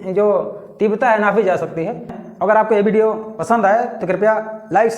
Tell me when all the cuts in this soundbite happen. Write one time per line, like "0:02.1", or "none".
0:02.2